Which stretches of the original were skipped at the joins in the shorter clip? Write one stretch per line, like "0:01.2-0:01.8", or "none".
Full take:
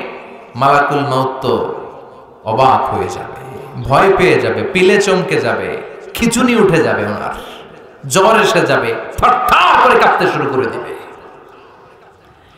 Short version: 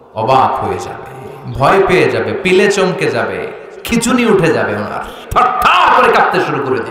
0:07.5-0:09.0